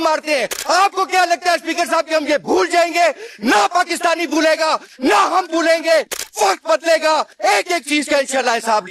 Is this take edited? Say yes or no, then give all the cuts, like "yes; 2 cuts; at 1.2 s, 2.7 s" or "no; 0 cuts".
no; 0 cuts